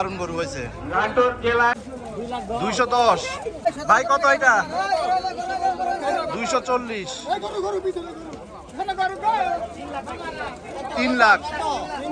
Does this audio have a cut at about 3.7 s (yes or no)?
yes